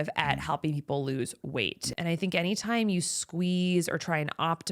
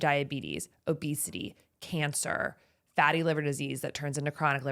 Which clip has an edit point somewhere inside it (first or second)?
first